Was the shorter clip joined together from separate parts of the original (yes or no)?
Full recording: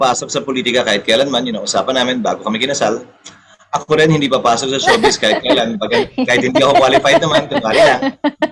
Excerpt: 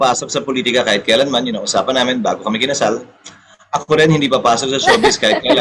no